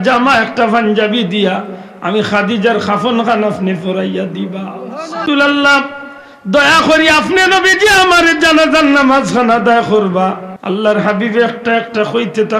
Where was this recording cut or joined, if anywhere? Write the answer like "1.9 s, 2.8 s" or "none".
5.2 s, 10.5 s